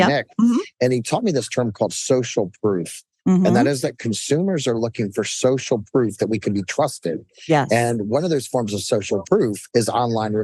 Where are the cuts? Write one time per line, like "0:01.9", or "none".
0:09.3